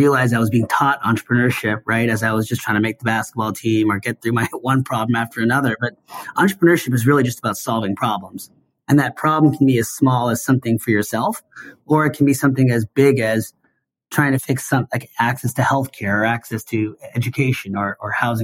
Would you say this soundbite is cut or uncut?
cut